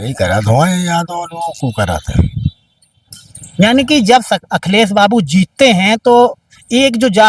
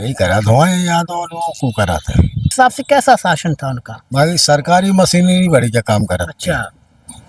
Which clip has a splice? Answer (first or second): second